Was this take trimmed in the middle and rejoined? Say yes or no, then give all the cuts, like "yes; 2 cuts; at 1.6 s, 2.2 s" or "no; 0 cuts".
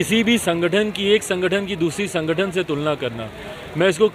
no; 0 cuts